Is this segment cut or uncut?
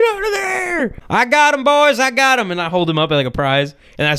cut